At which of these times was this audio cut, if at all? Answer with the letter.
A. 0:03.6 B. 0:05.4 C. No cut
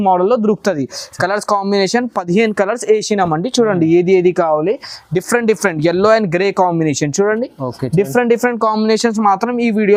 C